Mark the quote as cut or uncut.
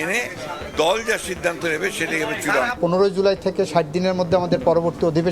cut